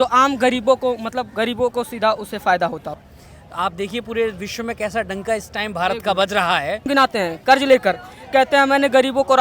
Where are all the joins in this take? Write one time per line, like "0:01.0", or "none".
0:03.1
0:06.9